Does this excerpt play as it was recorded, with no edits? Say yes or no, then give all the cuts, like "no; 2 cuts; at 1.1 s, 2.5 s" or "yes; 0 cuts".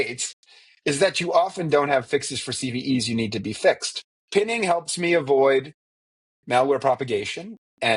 no; 1 cut; at 4.1 s